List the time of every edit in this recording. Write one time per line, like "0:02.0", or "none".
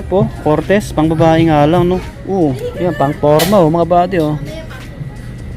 0:02.1